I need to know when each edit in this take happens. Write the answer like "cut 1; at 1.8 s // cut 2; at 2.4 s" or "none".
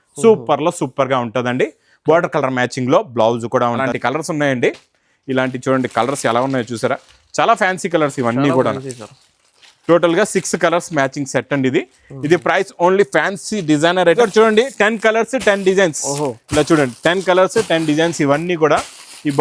cut 1; at 3.8 s // cut 2; at 14.2 s